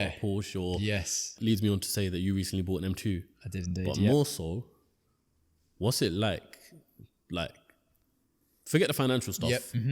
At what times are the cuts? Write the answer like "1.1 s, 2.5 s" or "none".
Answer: 1.4 s